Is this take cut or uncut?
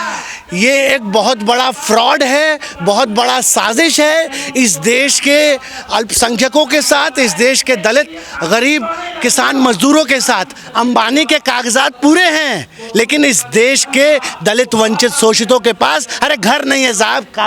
uncut